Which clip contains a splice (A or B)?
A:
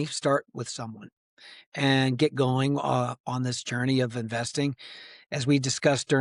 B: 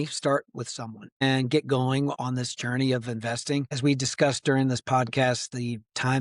B